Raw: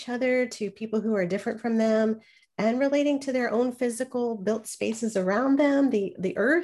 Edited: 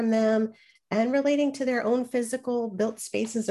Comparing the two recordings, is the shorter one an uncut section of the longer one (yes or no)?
yes